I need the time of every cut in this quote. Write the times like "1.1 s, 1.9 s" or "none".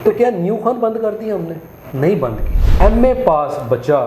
2.6 s